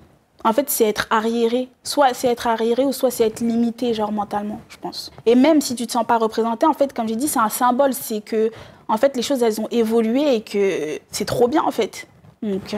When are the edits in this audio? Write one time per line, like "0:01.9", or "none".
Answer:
0:05.1